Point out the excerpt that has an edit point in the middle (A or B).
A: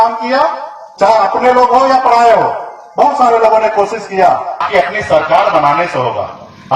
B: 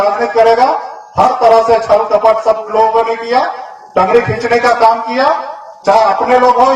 A